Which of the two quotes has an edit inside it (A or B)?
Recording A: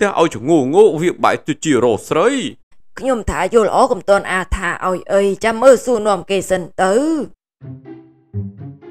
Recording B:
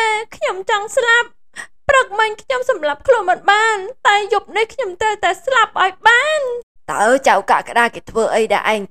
A